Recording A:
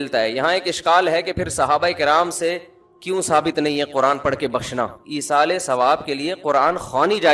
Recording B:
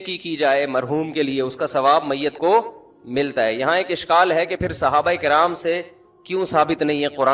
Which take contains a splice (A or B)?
A